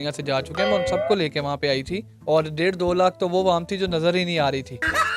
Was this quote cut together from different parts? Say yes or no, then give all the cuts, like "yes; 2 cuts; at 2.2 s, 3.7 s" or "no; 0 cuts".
no; 0 cuts